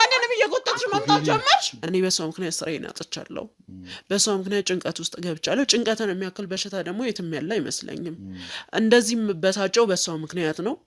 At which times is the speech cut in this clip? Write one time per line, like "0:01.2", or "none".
0:01.8